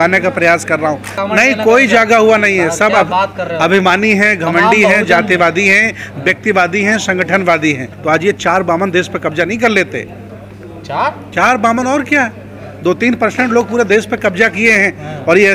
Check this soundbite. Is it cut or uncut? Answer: cut